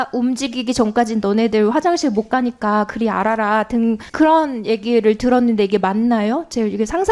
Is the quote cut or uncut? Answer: uncut